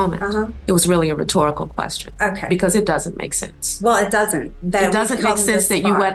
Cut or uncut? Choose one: uncut